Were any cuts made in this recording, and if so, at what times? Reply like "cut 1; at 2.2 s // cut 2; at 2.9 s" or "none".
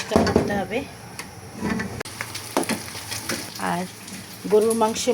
cut 1; at 2.0 s